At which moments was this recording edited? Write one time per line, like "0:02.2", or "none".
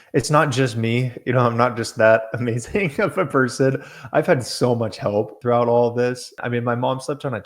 0:05.3
0:06.4

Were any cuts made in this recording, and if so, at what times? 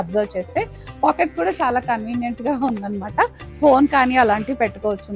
none

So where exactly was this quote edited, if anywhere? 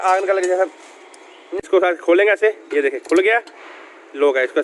0:01.6

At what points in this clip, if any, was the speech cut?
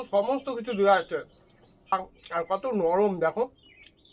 0:01.9

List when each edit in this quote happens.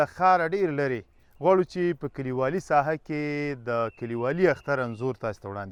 none

